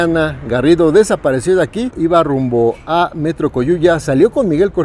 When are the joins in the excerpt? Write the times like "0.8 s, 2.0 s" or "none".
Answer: 1.9 s